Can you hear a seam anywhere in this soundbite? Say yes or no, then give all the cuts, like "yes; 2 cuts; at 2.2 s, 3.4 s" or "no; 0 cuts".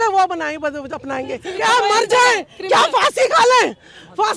yes; 1 cut; at 1.4 s